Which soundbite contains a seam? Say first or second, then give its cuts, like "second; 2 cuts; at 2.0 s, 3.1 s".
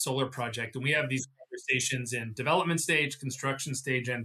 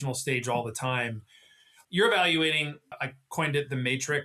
second; 2 cuts; at 1.7 s, 3.0 s